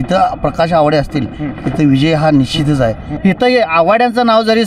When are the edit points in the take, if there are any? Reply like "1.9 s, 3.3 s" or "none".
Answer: 3.1 s

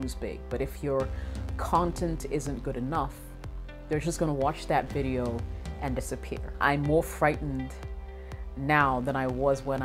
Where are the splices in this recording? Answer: 6.6 s

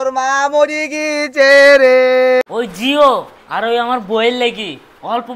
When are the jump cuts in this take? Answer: 2.4 s

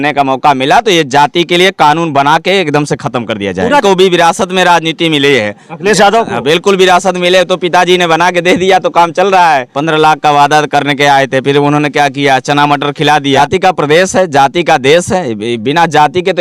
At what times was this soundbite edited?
3.8 s, 9.7 s, 13.4 s

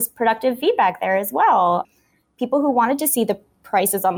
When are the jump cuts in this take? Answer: none

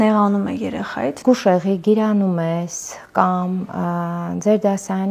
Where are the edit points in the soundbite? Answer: 1.2 s

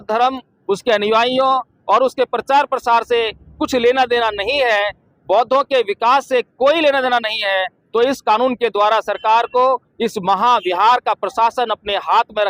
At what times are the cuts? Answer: none

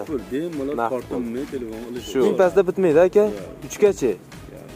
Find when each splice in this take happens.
2.3 s

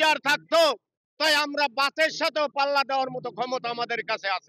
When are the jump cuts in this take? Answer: none

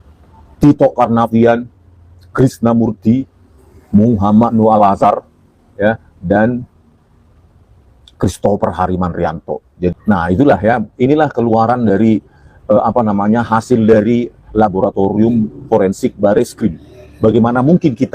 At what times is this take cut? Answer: 9.9 s

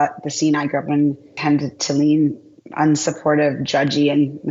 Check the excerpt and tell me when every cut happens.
1.3 s

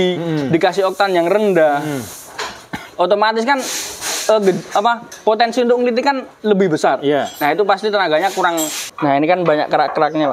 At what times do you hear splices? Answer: 8.8 s

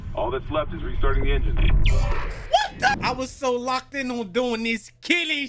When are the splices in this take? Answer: 2.9 s

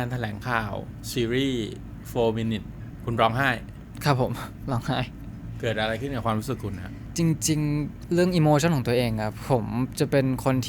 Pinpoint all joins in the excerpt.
none

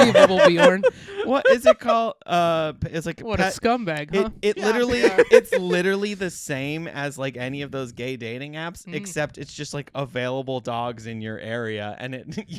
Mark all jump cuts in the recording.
none

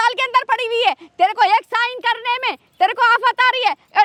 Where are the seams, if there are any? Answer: none

